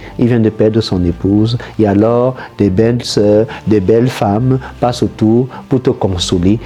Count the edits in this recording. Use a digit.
0